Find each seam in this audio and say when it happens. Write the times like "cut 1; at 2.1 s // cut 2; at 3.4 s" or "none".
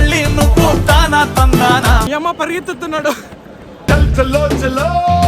cut 1; at 2.1 s